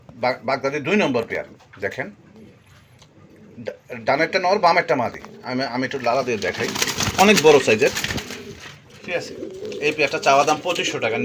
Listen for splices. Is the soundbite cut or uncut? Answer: uncut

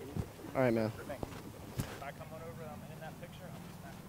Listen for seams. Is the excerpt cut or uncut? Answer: cut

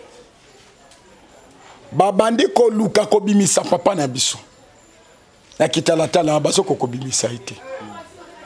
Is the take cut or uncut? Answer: uncut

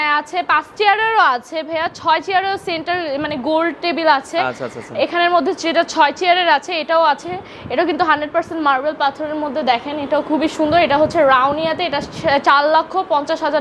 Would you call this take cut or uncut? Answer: uncut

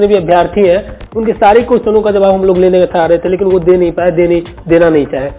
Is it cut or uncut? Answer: uncut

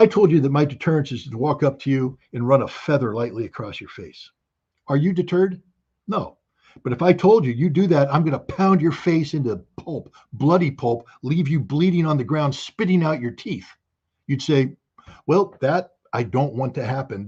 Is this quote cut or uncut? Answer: uncut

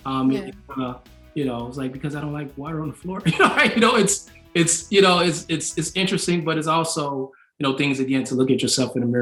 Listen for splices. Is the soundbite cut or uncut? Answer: uncut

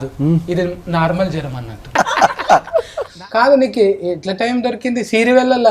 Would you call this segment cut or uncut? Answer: cut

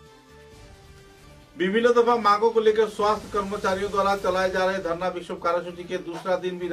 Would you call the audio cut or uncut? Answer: cut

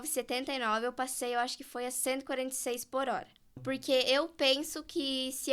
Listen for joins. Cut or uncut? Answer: cut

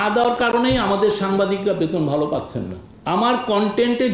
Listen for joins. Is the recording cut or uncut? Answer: cut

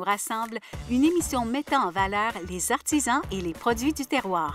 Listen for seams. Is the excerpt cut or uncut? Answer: uncut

